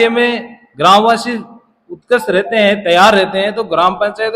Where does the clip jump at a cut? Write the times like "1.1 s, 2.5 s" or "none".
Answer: none